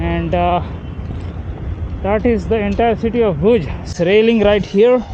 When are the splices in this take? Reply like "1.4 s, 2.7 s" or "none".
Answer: 3.9 s